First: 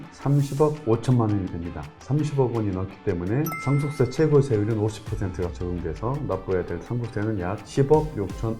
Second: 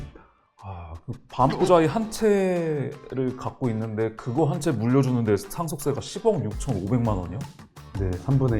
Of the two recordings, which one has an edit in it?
first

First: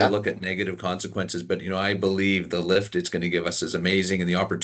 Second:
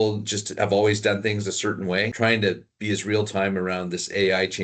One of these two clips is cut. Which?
second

